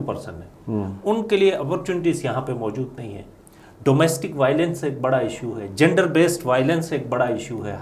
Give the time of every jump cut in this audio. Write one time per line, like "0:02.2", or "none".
none